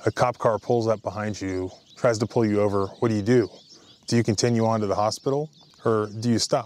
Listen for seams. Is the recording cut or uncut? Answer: cut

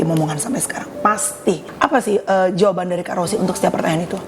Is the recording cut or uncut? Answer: cut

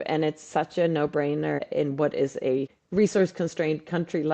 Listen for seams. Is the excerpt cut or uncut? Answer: cut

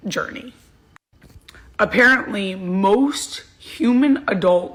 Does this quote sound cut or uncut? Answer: uncut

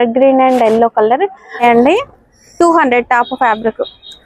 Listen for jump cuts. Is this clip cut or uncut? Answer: cut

